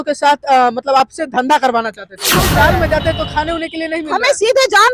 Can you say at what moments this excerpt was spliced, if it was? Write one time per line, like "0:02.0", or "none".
0:02.3